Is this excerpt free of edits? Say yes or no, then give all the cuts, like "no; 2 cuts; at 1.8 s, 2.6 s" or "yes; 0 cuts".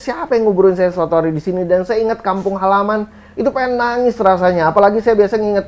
yes; 0 cuts